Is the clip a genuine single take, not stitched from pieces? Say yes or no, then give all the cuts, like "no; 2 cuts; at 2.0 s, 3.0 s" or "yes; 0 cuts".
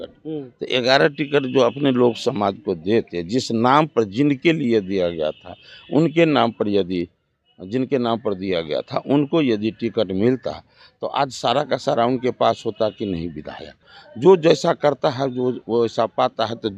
no; 1 cut; at 14.0 s